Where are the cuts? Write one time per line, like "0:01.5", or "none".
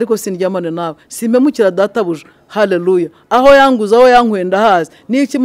none